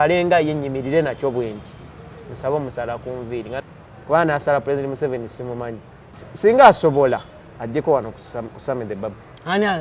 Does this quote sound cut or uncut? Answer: cut